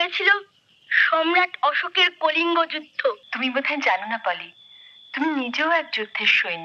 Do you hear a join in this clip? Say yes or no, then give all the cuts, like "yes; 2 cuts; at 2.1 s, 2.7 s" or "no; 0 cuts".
yes; 1 cut; at 3.3 s